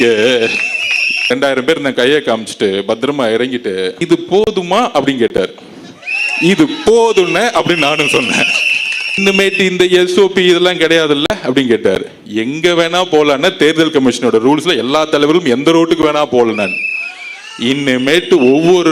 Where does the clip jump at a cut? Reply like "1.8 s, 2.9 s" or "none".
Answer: 1.3 s, 9.2 s